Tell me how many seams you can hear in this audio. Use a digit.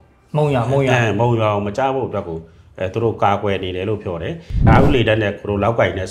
1